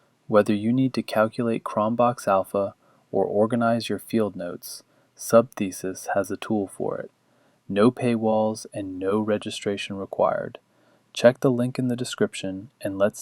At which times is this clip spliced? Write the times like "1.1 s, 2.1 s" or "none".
11.4 s